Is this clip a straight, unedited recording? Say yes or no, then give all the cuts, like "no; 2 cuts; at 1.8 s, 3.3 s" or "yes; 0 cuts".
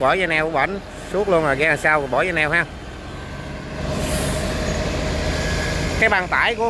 yes; 0 cuts